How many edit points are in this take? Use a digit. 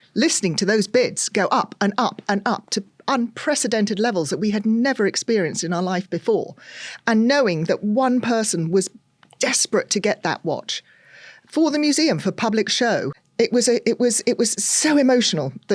1